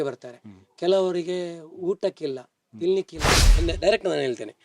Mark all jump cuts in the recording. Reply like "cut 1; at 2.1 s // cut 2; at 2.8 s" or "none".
cut 1; at 3.5 s